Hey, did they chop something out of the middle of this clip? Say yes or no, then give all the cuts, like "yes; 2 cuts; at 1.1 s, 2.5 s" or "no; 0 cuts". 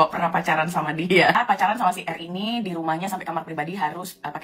yes; 1 cut; at 1.4 s